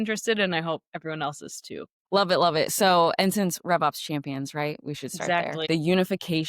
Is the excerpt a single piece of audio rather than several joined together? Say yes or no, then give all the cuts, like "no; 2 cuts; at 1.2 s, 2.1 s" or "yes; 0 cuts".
no; 2 cuts; at 1.9 s, 5.7 s